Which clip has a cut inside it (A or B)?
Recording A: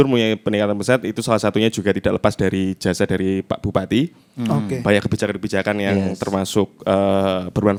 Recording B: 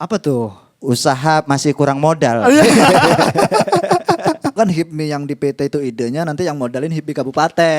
B